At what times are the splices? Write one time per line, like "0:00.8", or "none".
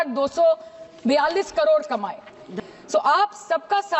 0:02.4